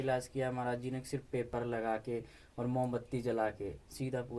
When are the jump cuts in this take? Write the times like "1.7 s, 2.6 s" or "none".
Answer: none